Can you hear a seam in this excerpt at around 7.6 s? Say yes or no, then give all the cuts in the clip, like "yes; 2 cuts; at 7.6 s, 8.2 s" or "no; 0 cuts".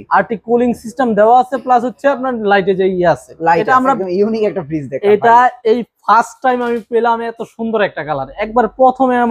no; 1 cut; at 4.0 s